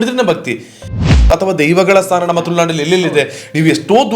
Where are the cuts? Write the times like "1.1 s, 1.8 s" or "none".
1.2 s